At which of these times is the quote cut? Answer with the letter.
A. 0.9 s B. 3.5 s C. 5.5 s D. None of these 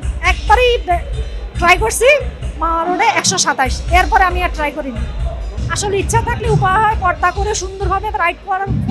C